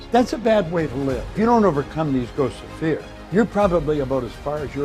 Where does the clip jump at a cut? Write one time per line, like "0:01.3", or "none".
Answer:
0:01.4
0:03.2